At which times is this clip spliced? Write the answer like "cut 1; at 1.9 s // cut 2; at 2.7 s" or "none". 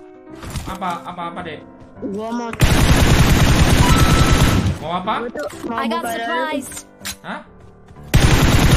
none